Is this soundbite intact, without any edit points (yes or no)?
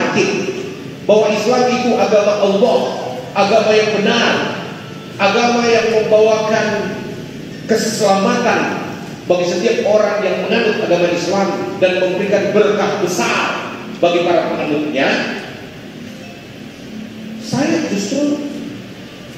yes